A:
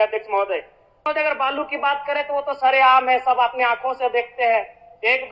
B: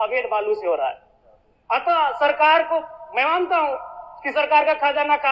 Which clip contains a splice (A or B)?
A